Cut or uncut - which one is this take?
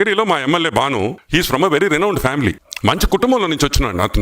cut